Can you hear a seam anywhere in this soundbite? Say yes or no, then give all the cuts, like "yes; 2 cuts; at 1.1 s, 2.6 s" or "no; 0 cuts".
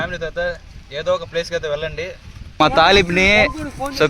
yes; 1 cut; at 2.6 s